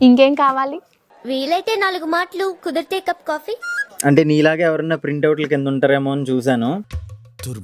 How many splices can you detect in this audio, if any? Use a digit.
1